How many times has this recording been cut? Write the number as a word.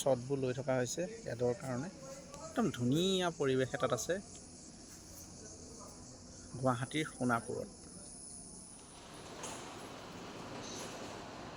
zero